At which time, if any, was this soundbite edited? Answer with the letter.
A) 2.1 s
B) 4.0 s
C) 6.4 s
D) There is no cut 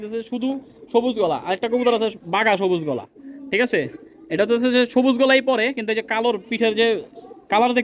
D